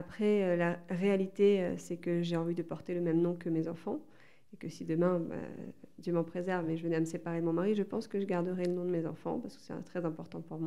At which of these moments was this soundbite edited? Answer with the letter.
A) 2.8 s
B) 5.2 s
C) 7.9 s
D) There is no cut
D